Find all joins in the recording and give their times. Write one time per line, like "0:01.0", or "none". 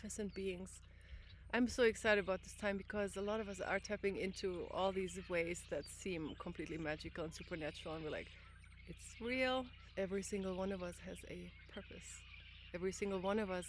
0:09.8